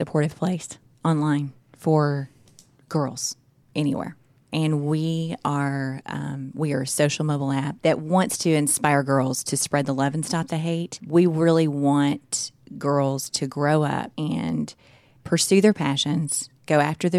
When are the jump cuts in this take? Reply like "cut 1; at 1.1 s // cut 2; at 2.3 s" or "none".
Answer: none